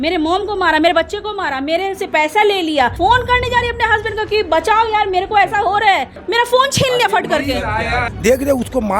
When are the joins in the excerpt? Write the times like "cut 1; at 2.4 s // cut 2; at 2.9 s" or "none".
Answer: cut 1; at 2.9 s // cut 2; at 6.2 s // cut 3; at 7.8 s